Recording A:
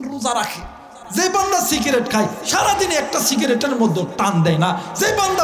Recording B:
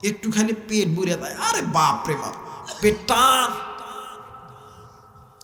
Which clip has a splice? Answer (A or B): A